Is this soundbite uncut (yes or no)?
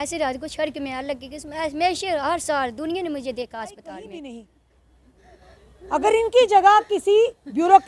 no